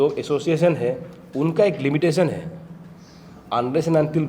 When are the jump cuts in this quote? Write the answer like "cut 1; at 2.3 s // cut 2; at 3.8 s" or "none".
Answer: none